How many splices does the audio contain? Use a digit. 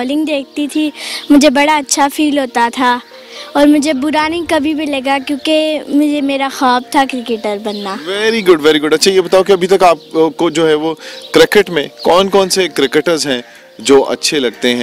0